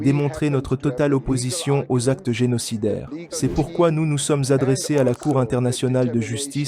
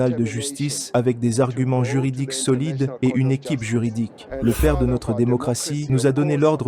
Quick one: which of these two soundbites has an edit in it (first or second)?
second